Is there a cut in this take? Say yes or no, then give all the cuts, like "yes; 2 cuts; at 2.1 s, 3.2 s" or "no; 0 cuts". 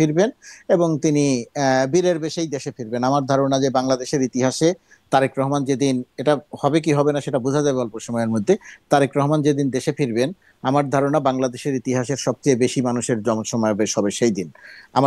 no; 0 cuts